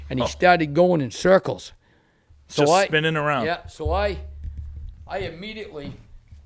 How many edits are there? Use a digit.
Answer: 0